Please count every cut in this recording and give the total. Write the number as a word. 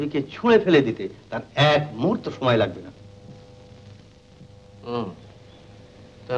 zero